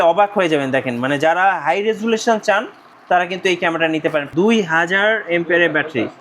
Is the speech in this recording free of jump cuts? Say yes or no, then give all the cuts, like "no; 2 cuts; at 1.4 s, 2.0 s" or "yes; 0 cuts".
no; 1 cut; at 4.3 s